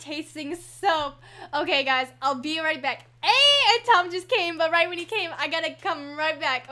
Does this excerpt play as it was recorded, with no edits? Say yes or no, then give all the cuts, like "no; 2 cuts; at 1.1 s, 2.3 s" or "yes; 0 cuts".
no; 1 cut; at 3.7 s